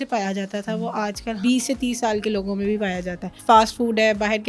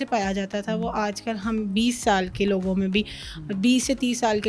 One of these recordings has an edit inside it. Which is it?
first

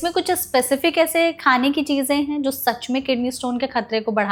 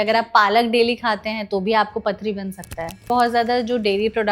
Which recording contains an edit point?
second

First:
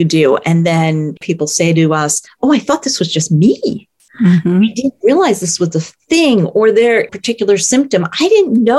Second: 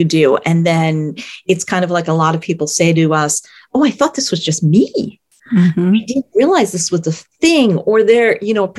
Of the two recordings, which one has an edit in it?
first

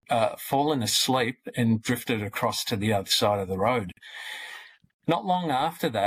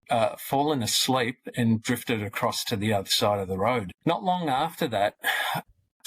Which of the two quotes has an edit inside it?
second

